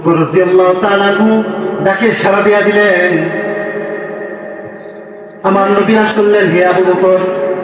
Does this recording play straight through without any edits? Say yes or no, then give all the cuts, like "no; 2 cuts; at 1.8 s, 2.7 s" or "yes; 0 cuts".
no; 1 cut; at 6.1 s